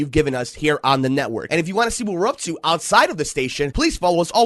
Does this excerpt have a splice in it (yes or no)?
yes